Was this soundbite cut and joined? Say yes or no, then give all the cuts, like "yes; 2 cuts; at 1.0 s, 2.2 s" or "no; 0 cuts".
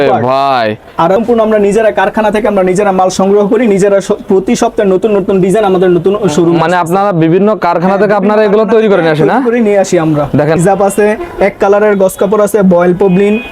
yes; 2 cuts; at 1.2 s, 10.6 s